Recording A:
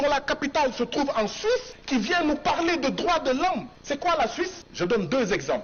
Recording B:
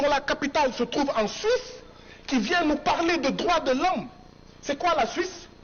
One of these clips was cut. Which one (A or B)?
A